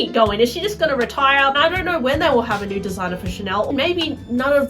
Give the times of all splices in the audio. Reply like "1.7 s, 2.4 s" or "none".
1.6 s, 3.7 s